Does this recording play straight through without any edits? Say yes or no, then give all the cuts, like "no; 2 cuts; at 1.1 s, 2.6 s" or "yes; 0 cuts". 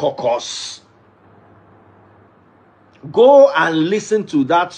yes; 0 cuts